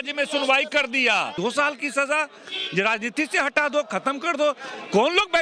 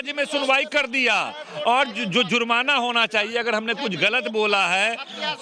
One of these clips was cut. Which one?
first; 1 cut; at 1.3 s

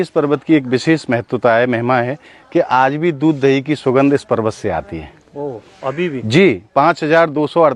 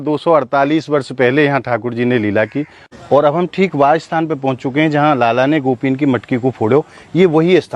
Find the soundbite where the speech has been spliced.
second; 1 cut; at 2.8 s

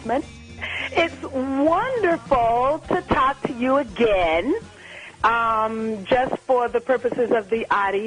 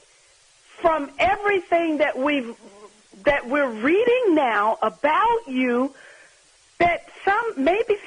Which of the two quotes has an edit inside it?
second; 1 cut; at 5.2 s

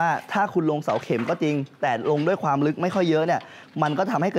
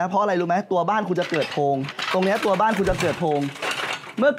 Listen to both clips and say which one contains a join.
second; 1 cut; at 2.0 s

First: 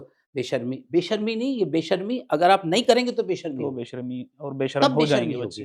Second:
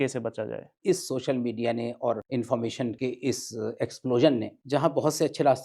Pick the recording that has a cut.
second; 4 cuts; at 0.8 s, 2.2 s, 3.0 s, 4.5 s

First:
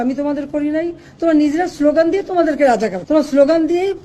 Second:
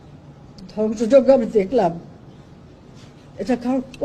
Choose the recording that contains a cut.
first; 1 cut; at 3.0 s

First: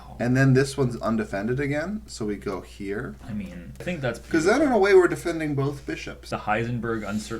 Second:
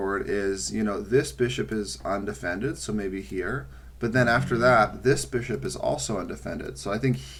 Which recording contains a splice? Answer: first; 2 cuts; at 3.8 s, 6.3 s

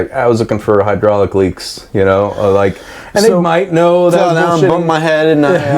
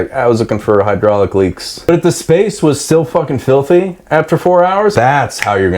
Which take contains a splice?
second; 2 cuts; at 1.8 s, 4.9 s

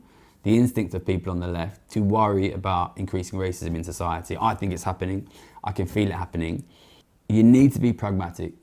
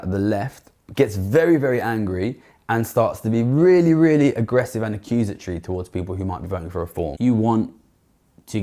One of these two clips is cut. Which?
second; 1 cut; at 7.1 s

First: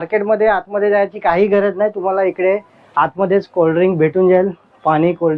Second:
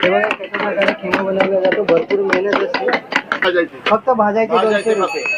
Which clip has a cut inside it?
second; 1 cut; at 3.4 s

